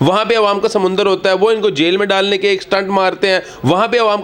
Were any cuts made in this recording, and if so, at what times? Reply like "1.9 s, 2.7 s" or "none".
none